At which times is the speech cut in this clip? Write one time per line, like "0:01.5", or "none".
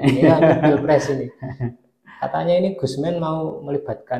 none